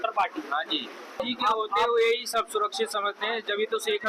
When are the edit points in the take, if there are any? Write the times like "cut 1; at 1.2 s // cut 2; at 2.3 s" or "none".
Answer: cut 1; at 1.2 s